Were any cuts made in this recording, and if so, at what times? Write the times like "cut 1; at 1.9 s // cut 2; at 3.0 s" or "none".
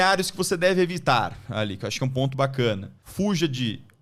none